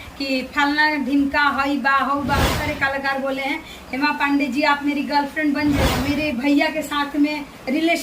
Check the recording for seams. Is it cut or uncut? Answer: cut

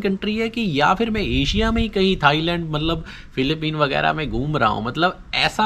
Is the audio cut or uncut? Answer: uncut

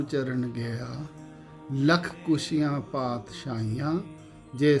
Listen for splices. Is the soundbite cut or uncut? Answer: uncut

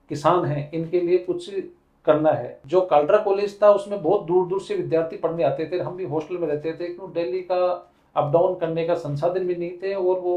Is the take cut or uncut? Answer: cut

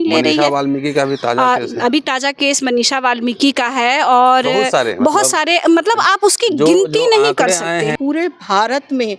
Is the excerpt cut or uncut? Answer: cut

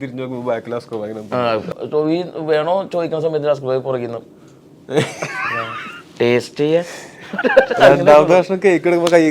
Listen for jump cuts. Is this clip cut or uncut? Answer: cut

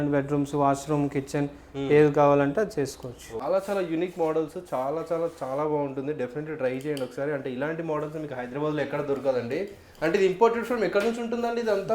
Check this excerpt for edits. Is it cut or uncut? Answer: cut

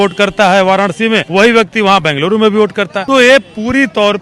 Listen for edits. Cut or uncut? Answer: cut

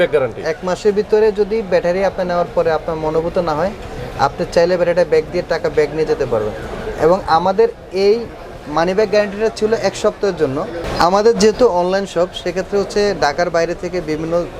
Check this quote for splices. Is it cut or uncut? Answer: uncut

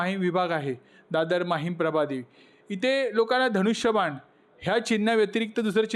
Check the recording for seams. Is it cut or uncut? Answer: uncut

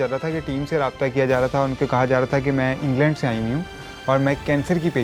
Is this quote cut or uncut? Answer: uncut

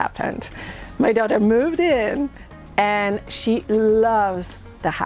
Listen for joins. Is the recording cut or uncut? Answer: uncut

